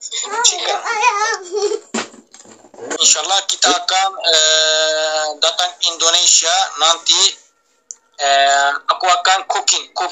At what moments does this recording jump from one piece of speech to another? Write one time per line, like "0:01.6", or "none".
0:03.0